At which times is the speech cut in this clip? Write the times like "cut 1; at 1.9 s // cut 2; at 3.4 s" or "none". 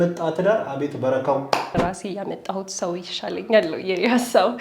cut 1; at 1.8 s